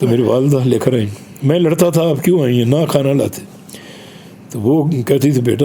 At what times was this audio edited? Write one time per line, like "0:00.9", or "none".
none